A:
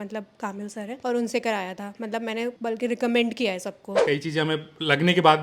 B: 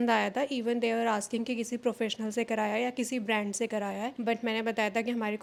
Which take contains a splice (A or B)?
A